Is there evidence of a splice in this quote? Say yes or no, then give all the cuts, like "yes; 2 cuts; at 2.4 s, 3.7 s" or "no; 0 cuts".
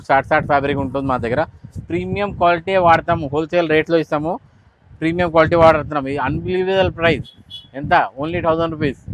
no; 0 cuts